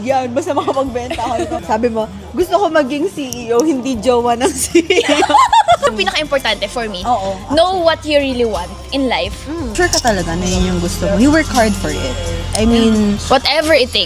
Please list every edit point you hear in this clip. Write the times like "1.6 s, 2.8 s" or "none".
1.6 s, 5.9 s, 9.7 s